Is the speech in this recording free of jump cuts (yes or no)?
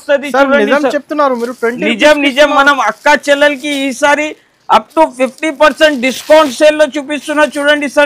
yes